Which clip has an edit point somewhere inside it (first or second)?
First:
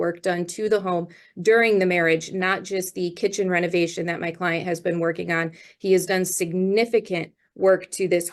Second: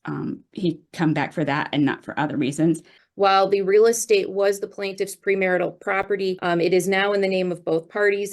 second